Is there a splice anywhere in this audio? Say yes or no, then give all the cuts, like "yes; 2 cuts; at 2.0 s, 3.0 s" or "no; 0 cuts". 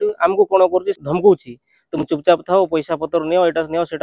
yes; 1 cut; at 1.0 s